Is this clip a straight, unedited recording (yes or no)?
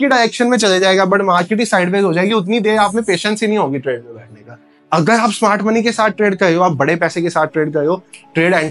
yes